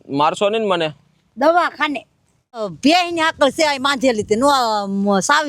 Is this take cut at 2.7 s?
yes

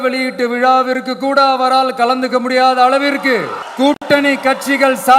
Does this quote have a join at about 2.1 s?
no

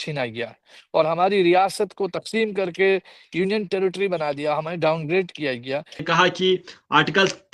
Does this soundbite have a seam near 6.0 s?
yes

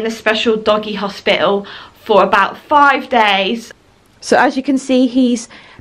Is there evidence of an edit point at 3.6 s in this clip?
yes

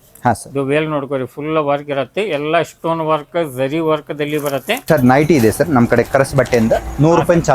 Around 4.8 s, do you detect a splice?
yes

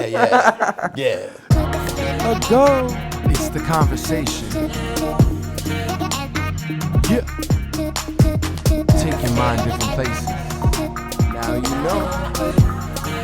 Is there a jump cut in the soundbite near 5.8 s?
no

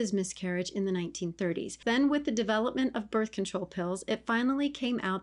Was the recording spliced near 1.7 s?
yes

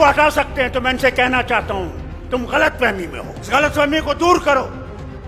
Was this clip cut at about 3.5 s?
yes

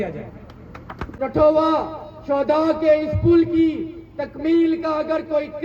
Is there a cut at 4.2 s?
no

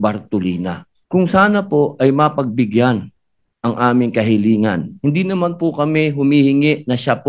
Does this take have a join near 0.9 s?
yes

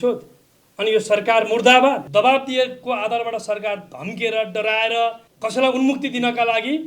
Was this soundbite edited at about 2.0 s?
yes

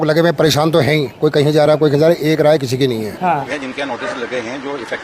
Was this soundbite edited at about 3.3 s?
yes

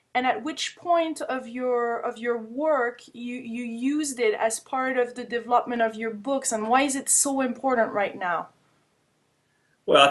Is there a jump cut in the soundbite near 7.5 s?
no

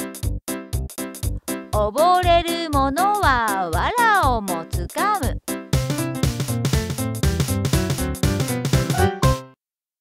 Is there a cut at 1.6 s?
no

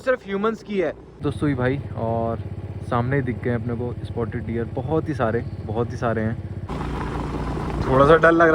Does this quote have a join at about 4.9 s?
no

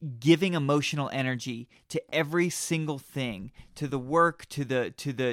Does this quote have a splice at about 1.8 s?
no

